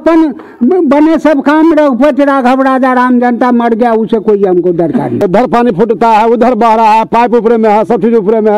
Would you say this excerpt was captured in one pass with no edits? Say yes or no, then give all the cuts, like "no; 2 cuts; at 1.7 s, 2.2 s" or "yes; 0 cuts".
no; 1 cut; at 5.2 s